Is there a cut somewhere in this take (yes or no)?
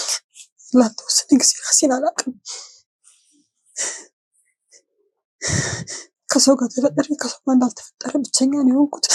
no